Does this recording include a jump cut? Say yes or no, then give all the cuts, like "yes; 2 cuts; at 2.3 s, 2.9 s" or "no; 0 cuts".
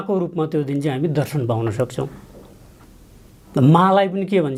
no; 0 cuts